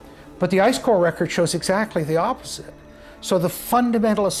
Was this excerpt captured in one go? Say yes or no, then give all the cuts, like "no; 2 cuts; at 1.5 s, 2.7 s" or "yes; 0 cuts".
yes; 0 cuts